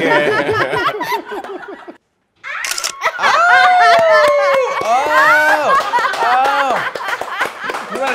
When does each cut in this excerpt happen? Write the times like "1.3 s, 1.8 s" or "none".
1.9 s